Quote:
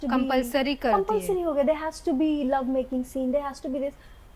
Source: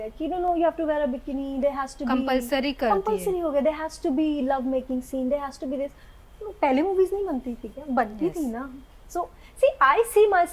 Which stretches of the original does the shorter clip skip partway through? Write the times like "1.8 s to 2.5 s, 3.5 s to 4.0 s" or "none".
none